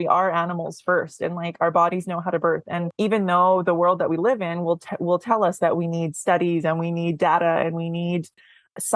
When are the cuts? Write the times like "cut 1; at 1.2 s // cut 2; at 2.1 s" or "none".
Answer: cut 1; at 2.9 s